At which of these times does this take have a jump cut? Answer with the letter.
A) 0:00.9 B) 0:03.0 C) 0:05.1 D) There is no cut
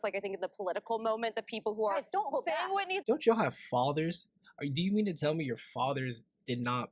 B